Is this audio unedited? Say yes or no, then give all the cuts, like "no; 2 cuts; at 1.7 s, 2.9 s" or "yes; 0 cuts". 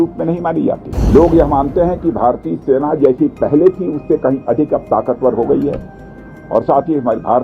no; 1 cut; at 0.9 s